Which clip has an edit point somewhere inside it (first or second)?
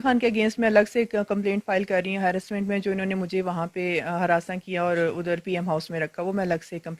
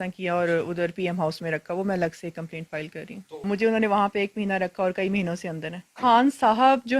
second